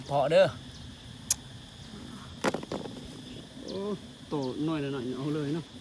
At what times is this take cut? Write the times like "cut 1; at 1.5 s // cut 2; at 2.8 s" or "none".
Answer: cut 1; at 3.4 s

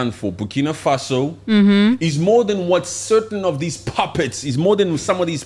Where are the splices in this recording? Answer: none

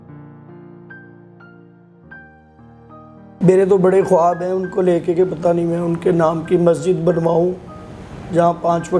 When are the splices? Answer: cut 1; at 3.4 s

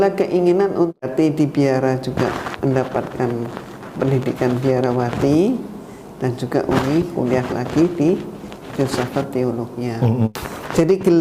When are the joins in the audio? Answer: cut 1; at 1.0 s // cut 2; at 10.3 s

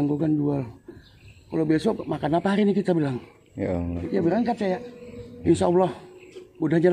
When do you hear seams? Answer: cut 1; at 3.9 s // cut 2; at 5.3 s

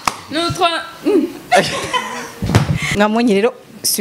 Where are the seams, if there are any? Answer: cut 1; at 2.9 s

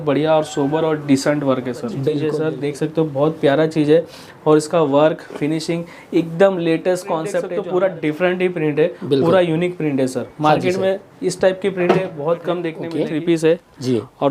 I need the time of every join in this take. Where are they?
cut 1; at 2.2 s // cut 2; at 7.4 s // cut 3; at 12.8 s

